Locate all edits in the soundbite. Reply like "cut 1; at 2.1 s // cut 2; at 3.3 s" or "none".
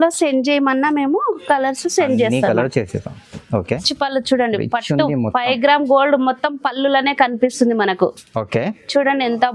cut 1; at 3.9 s